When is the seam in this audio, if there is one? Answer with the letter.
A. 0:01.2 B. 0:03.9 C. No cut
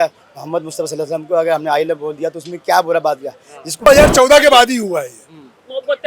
B